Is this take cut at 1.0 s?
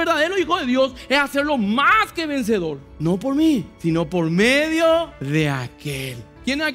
no; 3 cuts; at 2.9 s, 3.7 s, 5.2 s

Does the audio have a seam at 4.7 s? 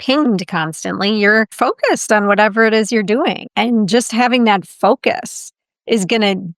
no; 2 cuts; at 1.5 s, 3.4 s

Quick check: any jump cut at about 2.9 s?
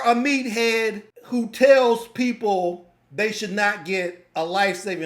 no; 1 cut; at 1.1 s

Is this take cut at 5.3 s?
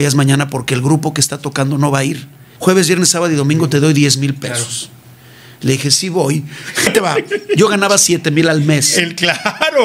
no; 2 cuts; at 2.4 s, 6.9 s

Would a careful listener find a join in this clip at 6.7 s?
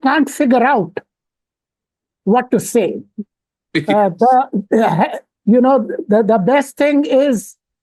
no; 0 cuts

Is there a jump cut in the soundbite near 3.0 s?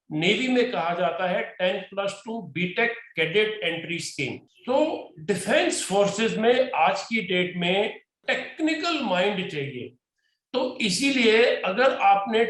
no; 2 cuts; at 4.5 s, 8.1 s

